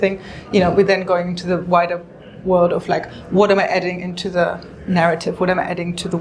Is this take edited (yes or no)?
no